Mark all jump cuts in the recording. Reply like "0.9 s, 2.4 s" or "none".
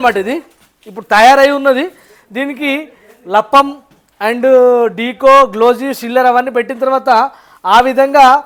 none

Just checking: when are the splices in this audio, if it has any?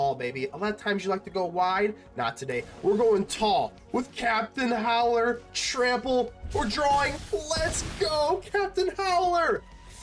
none

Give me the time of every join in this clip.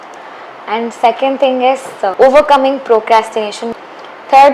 2.1 s, 3.7 s

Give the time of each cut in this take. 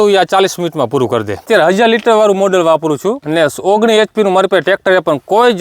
1.4 s, 3.2 s

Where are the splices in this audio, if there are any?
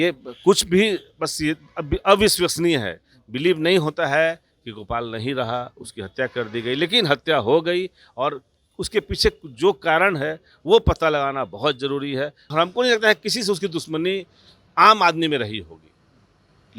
12.5 s

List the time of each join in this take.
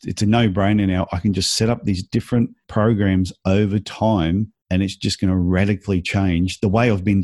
2.6 s, 4.6 s

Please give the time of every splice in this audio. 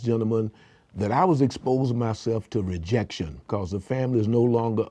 3.5 s

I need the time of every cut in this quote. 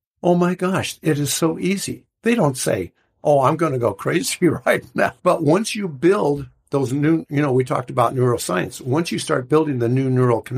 5.2 s

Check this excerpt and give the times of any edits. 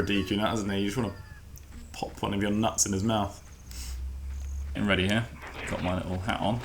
none

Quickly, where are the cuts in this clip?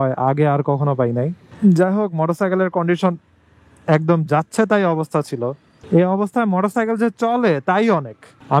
1.4 s

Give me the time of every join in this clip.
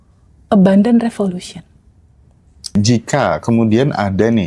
2.7 s

